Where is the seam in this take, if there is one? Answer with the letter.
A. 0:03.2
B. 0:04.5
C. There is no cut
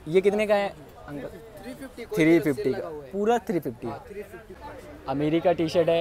B